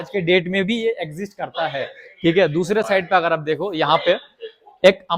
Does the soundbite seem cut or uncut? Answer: uncut